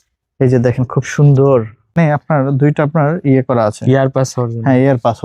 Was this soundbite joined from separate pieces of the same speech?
yes; 1 cut; at 2.0 s

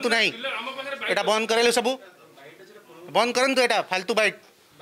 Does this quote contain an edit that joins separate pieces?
no; 0 cuts

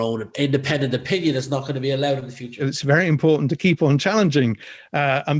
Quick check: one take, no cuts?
no; 1 cut; at 2.6 s

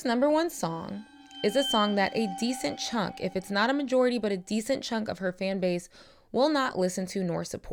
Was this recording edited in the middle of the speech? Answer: no; 0 cuts

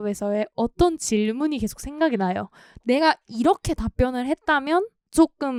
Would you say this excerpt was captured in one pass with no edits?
yes; 0 cuts

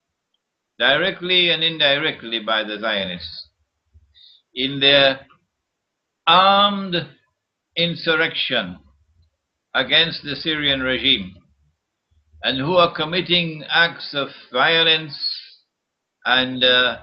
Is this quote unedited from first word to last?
no; 1 cut; at 12.6 s

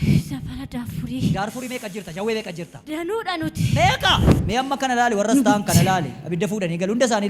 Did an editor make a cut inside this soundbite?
yes; 2 cuts; at 2.8 s, 4.3 s

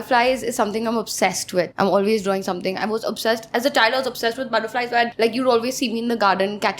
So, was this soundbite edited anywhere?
yes; 2 cuts; at 1.7 s, 5.1 s

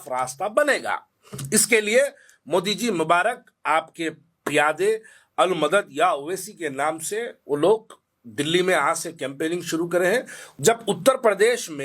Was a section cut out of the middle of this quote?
yes; 1 cut; at 10.4 s

